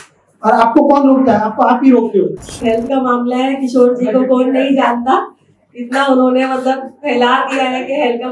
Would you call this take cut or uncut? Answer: cut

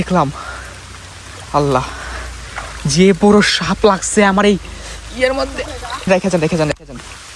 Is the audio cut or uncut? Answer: cut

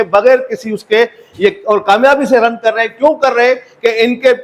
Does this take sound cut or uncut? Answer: uncut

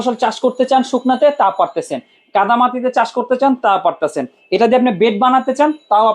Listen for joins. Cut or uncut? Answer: uncut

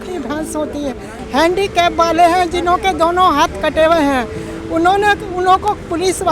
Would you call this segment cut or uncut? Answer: cut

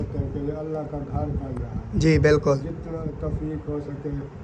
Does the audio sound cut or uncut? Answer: cut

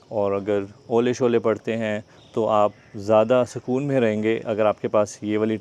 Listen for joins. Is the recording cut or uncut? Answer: uncut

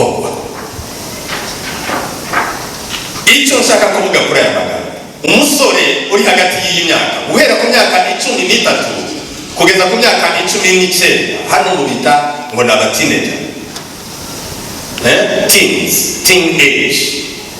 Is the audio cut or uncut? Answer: uncut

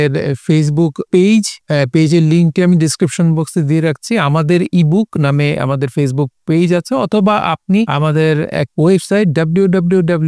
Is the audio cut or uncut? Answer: cut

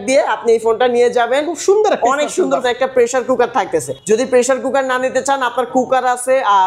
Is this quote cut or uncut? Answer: cut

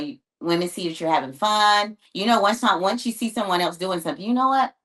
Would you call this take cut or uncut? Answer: cut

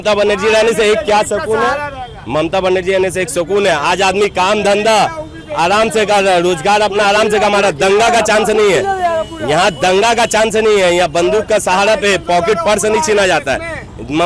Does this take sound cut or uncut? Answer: uncut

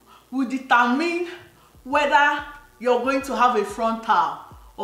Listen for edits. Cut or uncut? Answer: uncut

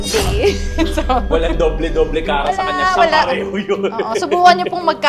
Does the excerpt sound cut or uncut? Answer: uncut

